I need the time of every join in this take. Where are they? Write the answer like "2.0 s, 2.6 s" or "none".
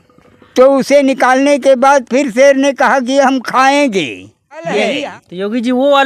4.9 s